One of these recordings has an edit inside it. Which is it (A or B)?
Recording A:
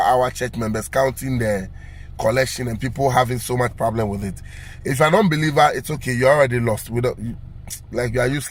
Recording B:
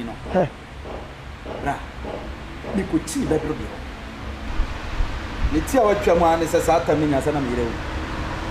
B